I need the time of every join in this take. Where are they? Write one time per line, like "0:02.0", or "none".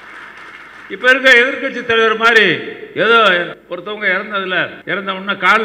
0:00.8
0:03.6
0:04.8

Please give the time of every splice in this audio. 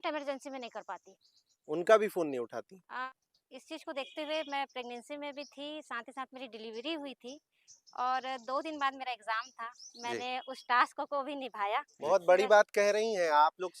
0:03.1
0:11.9

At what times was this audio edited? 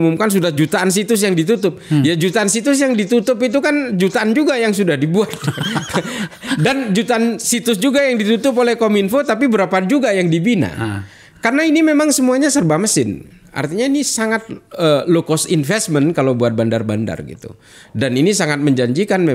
none

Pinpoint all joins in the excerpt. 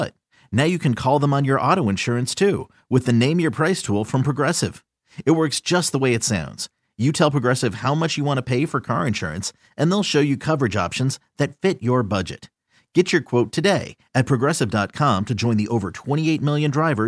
none

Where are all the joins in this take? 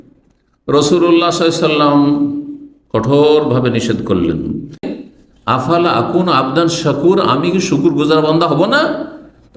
0:04.9

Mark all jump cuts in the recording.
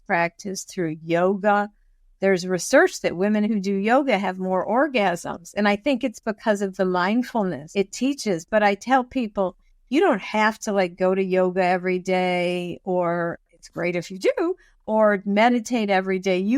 0:07.6

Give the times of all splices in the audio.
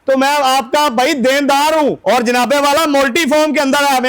0:02.0

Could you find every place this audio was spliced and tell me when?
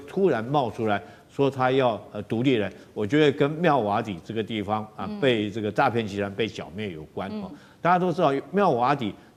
none

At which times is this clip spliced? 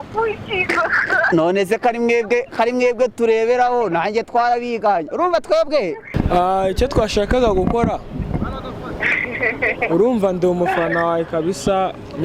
0:06.1

